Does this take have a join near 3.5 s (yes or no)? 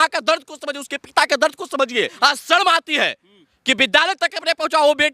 no